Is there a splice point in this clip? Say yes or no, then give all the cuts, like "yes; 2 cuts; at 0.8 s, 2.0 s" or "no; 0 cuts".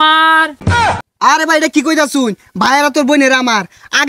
yes; 1 cut; at 0.9 s